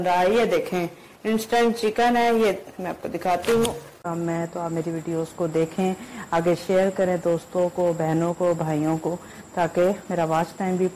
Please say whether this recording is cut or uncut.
cut